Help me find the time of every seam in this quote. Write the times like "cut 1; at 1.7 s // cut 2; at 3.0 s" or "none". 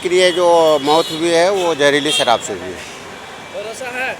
none